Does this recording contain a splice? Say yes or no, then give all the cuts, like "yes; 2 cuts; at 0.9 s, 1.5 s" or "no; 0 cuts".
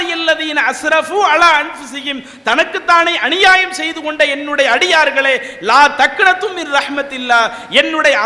no; 0 cuts